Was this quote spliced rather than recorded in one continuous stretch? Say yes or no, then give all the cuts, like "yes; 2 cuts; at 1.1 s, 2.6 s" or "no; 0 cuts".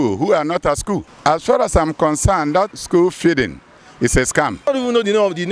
yes; 3 cuts; at 1.1 s, 2.7 s, 4.7 s